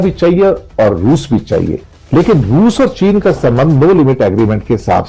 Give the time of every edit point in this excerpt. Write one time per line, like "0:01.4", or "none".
0:01.8